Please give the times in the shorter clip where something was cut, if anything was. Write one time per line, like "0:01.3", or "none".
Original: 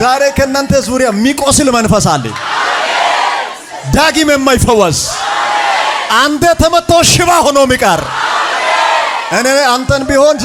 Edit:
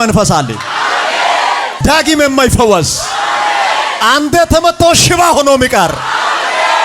0:01.7